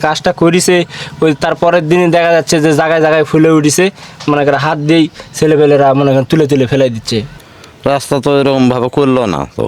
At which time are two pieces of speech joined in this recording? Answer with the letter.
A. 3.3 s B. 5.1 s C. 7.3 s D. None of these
C